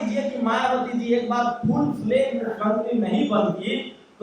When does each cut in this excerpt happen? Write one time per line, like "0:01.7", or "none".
none